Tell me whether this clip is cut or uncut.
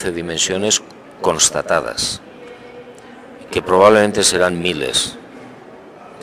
uncut